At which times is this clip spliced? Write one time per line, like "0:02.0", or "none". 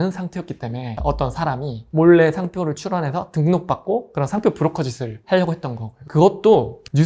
0:06.0